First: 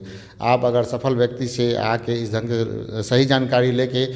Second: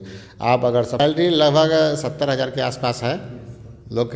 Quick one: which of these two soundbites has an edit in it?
second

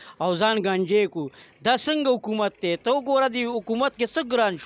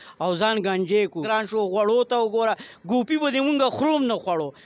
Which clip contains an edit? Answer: second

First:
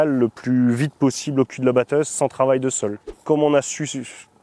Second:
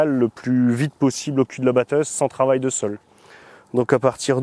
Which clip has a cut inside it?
first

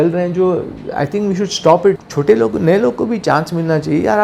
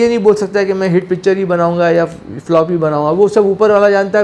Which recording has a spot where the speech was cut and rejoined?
first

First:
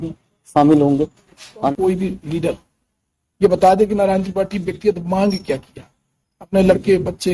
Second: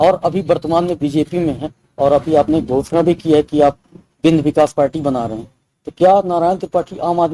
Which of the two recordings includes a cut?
first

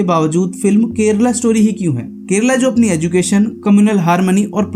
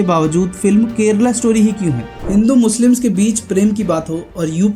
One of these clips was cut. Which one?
second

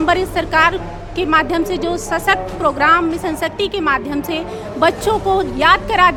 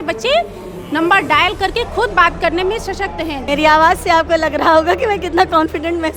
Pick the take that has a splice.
second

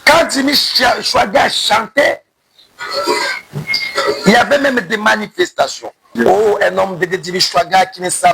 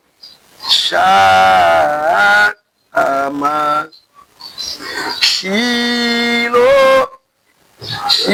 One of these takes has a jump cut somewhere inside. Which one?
first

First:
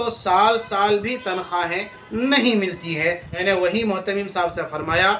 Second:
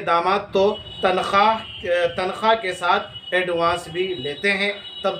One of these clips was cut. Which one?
first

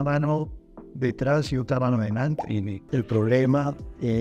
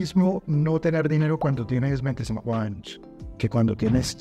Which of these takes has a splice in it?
first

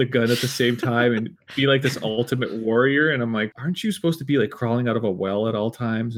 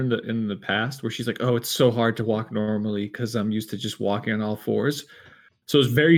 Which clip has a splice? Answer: first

